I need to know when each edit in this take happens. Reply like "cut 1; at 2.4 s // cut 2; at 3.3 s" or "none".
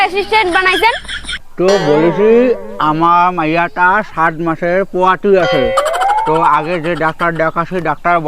cut 1; at 1.5 s